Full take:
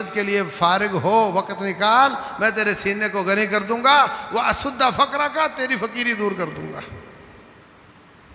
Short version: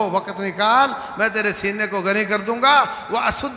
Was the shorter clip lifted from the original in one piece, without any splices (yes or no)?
yes